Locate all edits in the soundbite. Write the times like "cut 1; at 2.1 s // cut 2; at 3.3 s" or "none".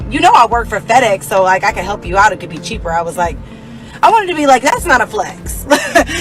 none